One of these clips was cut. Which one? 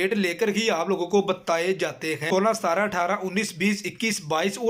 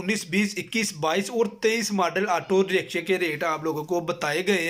first; 1 cut; at 2.3 s

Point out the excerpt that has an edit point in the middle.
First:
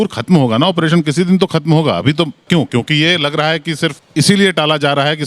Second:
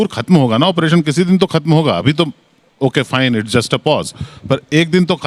first; 2 cuts; at 2.4 s, 4.0 s

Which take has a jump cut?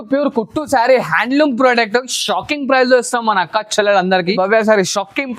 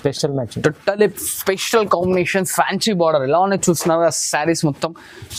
first; 1 cut; at 4.4 s

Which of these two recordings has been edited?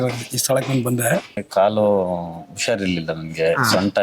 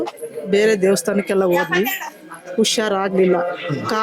first; 1 cut; at 1.4 s

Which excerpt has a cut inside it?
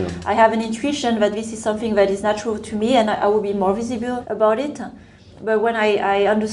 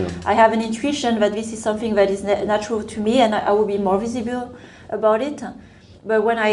first; 2 cuts; at 2.2 s, 4.3 s

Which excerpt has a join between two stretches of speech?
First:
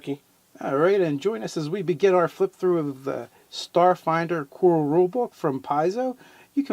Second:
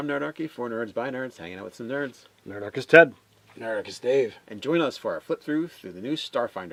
first; 1 cut; at 5.3 s

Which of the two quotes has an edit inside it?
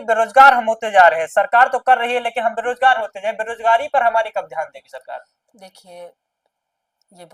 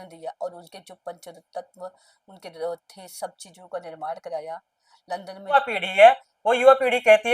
second; 1 cut; at 5.5 s

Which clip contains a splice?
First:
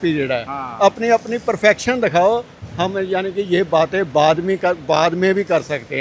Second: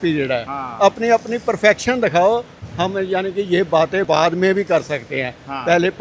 second; 1 cut; at 4.1 s

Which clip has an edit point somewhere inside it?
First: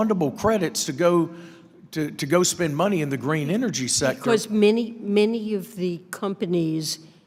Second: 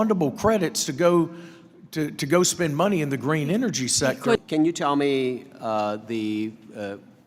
second; 1 cut; at 4.4 s

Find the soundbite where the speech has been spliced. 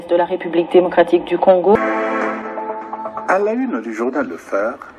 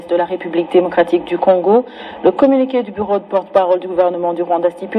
first; 1 cut; at 1.8 s

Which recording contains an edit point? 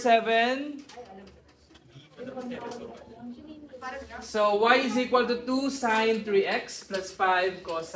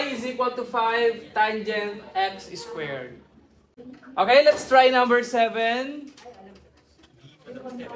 second; 1 cut; at 3.8 s

